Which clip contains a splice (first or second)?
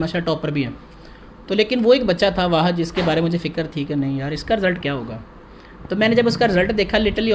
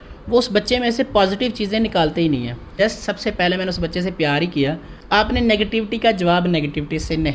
second